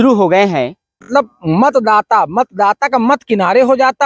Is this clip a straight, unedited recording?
no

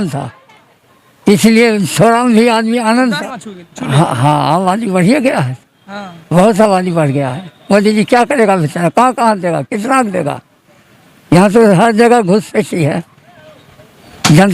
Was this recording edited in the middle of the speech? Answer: yes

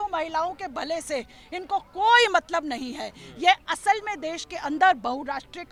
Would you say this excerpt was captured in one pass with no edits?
yes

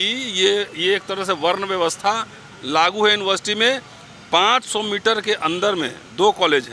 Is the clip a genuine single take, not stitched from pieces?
yes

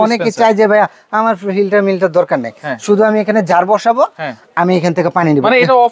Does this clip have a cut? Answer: no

